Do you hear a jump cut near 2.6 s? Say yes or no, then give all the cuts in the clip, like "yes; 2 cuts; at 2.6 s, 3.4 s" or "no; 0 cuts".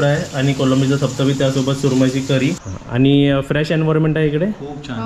yes; 1 cut; at 2.6 s